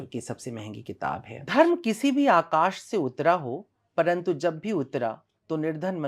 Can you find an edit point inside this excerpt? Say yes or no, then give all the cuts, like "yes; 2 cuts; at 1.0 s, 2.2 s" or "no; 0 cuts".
yes; 1 cut; at 1.3 s